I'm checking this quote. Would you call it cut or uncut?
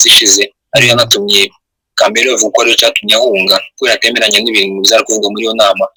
uncut